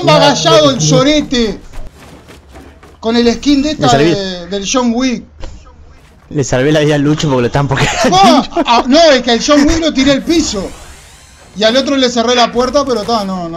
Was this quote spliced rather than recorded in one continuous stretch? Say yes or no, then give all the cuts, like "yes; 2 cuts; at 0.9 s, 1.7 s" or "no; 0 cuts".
no; 0 cuts